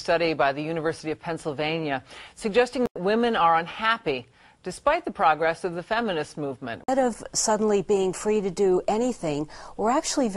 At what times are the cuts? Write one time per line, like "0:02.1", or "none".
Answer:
0:06.9